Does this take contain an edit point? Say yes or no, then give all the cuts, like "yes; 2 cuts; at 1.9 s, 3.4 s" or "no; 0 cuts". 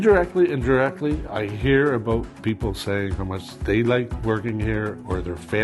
yes; 2 cuts; at 3.5 s, 4.1 s